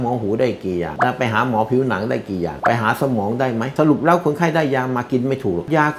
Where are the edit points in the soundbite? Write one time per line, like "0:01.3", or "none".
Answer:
none